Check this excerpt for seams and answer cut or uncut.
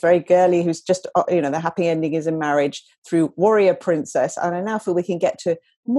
uncut